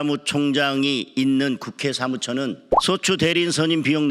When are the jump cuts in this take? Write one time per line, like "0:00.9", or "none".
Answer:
0:02.7